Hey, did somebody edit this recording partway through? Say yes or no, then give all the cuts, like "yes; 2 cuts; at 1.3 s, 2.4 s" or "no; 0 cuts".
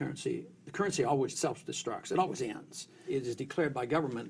yes; 2 cuts; at 1.3 s, 3.0 s